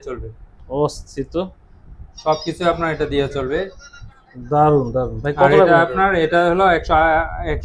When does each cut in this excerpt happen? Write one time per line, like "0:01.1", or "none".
none